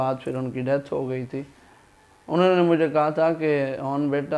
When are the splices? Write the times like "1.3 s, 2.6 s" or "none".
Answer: none